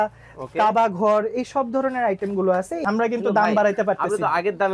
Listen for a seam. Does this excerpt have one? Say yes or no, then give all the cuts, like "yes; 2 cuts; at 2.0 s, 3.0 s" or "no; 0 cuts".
yes; 1 cut; at 2.7 s